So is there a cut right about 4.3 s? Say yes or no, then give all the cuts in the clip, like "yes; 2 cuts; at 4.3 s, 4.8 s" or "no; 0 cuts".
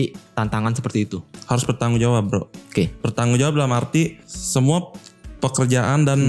no; 1 cut; at 1.4 s